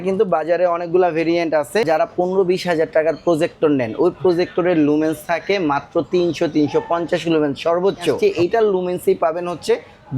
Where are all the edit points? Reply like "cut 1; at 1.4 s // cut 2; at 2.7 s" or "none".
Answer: cut 1; at 1.9 s // cut 2; at 8.2 s